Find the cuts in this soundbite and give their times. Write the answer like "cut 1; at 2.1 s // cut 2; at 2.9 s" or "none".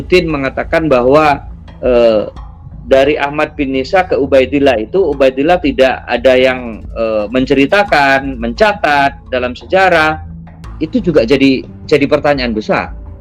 none